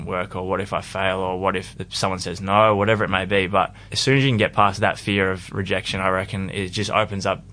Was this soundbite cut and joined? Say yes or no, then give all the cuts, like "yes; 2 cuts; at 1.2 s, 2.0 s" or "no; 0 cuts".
yes; 2 cuts; at 1.8 s, 4.8 s